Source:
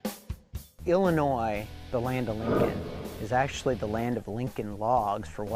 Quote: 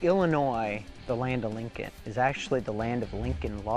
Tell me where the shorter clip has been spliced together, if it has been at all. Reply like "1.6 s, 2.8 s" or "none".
1.6 s